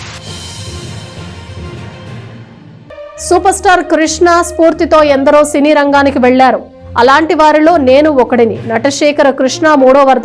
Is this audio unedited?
no; 1 cut; at 2.4 s

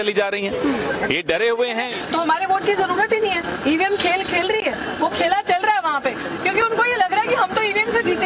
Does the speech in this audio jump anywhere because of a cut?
yes; 2 cuts; at 1.9 s, 6.2 s

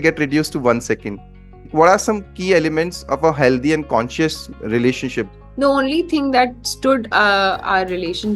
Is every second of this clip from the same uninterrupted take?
no; 2 cuts; at 1.7 s, 5.3 s

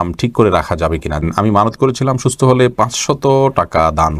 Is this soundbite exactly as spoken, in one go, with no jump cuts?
no; 1 cut; at 1.2 s

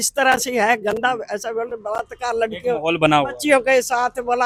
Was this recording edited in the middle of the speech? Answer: no; 0 cuts

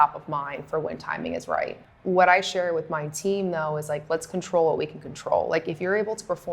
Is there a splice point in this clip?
yes; 1 cut; at 1.9 s

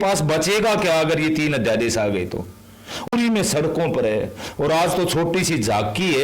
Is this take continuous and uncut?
no; 1 cut; at 3.1 s

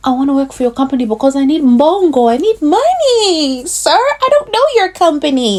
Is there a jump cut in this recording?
no; 0 cuts

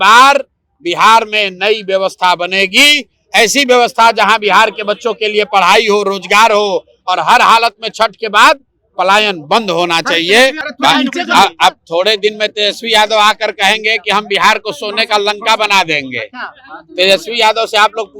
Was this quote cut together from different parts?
yes; 1 cut; at 10.6 s

